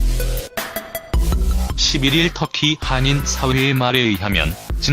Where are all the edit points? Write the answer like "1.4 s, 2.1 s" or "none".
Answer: 2.5 s